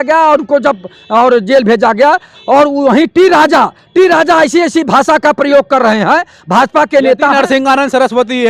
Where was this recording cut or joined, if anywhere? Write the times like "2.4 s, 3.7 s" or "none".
none